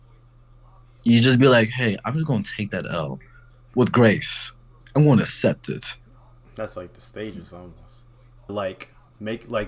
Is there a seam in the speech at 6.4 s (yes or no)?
no